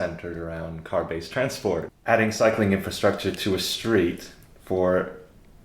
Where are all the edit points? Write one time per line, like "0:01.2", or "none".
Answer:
0:01.9